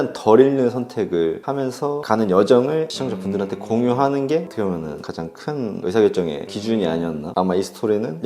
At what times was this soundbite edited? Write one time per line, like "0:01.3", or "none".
0:04.5
0:07.2